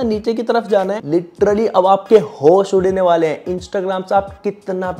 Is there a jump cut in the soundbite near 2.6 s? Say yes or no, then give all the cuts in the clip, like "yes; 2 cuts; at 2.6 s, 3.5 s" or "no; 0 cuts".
no; 1 cut; at 1.0 s